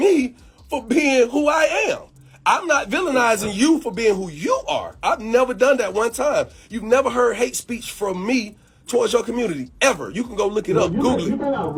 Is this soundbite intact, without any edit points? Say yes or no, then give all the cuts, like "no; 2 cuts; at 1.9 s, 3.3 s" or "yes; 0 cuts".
yes; 0 cuts